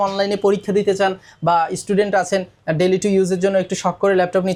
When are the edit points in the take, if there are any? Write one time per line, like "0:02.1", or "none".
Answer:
none